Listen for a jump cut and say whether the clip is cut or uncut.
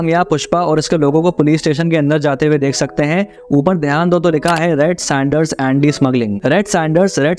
uncut